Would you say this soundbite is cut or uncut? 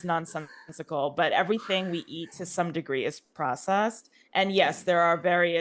uncut